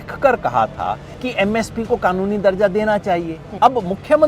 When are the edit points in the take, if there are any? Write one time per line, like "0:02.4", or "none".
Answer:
0:01.1
0:03.4